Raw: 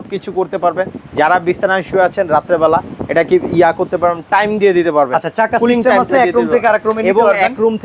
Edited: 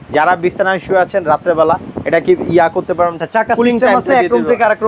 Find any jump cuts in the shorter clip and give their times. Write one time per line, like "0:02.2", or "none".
0:03.2